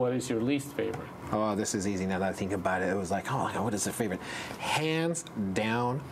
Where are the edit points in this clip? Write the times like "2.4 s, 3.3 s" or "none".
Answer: 1.1 s